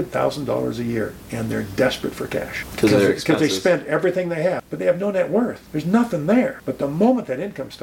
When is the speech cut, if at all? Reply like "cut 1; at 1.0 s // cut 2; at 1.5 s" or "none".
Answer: cut 1; at 2.6 s // cut 2; at 4.7 s // cut 3; at 5.6 s // cut 4; at 6.6 s